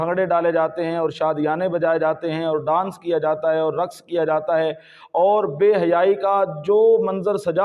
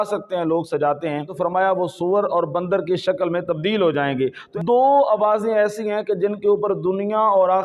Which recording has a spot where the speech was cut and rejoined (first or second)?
second